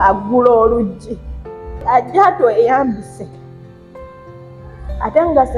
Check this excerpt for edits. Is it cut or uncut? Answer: cut